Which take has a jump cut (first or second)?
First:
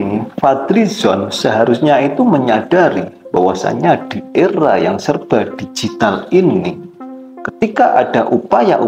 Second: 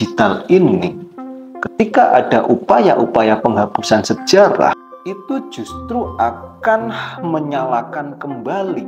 second